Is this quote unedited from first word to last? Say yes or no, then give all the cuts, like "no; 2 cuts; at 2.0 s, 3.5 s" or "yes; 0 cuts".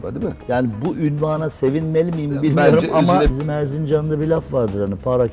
no; 1 cut; at 3.3 s